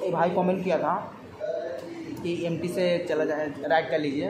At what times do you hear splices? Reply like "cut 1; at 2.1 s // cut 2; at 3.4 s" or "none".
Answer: none